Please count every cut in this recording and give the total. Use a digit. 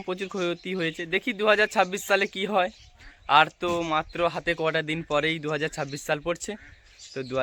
0